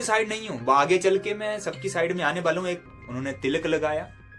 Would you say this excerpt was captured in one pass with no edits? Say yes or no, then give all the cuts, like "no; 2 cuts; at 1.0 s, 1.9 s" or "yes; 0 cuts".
no; 1 cut; at 2.8 s